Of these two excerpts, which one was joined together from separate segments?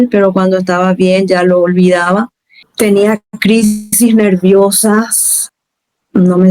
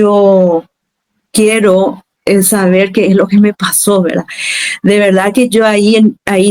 first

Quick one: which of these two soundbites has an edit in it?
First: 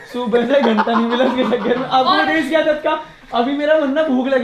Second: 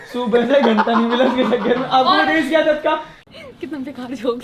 second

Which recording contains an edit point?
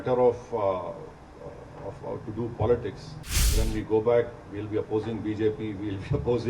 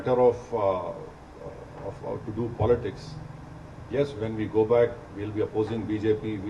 first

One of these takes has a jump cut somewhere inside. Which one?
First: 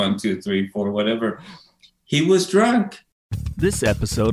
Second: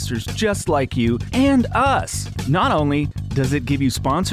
first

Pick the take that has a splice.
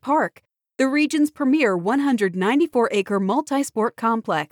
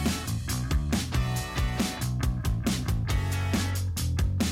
second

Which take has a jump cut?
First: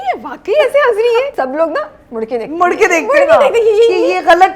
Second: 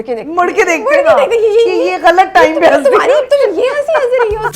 first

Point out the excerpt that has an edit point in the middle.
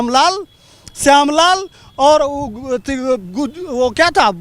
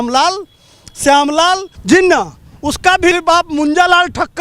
second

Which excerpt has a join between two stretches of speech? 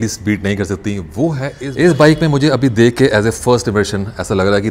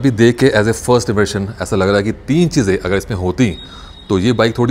first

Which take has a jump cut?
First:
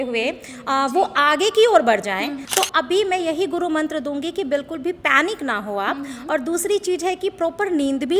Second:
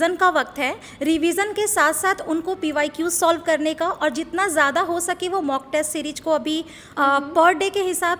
first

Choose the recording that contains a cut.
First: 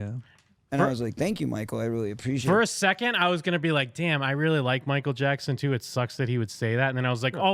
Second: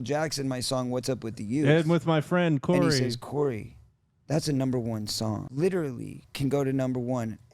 second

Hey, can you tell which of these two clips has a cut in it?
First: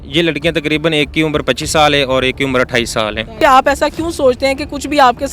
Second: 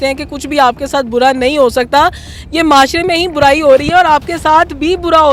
first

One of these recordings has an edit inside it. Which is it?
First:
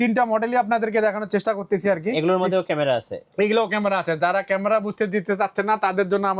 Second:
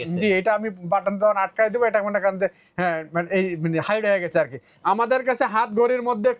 second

